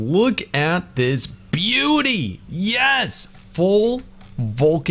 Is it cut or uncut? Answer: cut